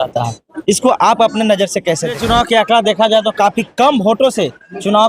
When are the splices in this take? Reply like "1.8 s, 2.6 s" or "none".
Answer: 2.2 s